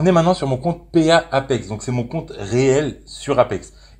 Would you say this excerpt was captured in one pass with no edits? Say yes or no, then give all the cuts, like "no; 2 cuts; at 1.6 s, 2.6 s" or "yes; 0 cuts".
yes; 0 cuts